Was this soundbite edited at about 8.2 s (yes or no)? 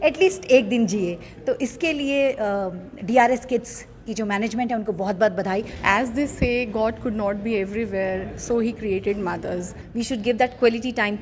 no